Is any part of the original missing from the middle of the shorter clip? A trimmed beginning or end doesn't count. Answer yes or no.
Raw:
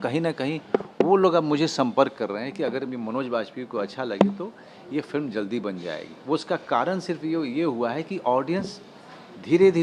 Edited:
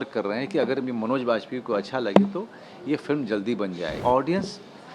yes